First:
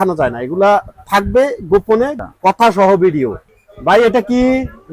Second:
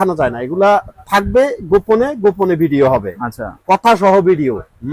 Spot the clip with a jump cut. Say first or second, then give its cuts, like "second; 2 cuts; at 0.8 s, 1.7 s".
first; 2 cuts; at 2.1 s, 3.5 s